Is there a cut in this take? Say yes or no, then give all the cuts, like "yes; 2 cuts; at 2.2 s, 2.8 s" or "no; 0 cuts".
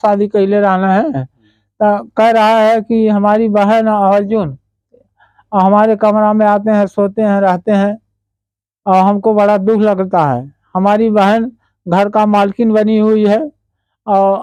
no; 0 cuts